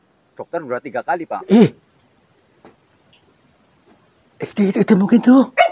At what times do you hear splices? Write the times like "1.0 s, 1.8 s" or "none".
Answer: 1.5 s